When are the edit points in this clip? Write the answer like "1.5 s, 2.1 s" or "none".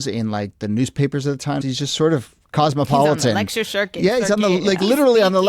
1.6 s